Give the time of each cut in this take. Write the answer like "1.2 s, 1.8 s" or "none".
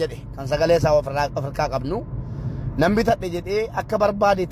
none